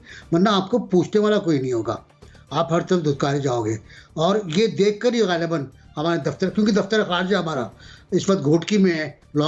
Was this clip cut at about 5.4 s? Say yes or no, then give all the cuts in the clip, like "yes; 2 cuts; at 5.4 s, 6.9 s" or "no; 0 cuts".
no; 0 cuts